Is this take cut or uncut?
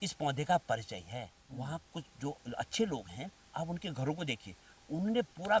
cut